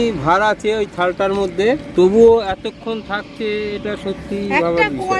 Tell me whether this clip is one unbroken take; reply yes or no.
no